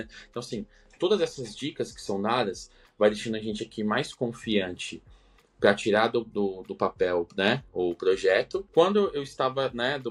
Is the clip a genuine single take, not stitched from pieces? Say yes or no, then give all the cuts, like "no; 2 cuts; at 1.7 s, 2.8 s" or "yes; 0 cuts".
no; 1 cut; at 8.7 s